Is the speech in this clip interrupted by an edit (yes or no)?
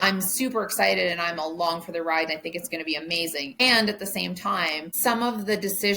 yes